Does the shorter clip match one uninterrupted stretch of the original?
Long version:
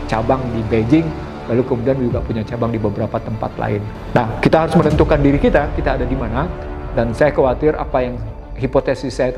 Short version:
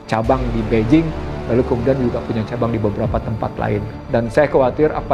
no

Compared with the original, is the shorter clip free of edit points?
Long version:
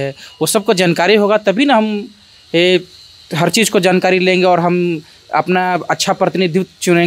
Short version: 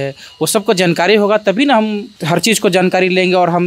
no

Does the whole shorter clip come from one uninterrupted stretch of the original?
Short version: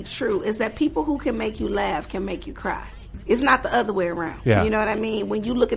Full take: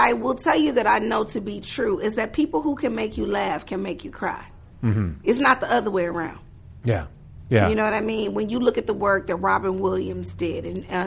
no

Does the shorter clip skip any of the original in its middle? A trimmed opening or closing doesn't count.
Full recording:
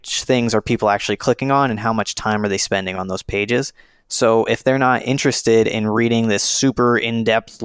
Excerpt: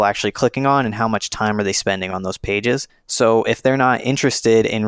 yes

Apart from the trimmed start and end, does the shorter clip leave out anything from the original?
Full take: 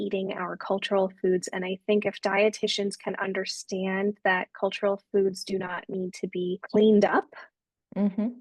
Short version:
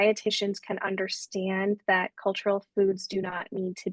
no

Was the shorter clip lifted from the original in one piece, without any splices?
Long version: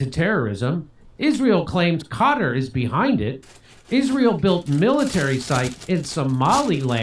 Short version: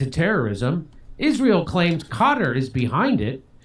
yes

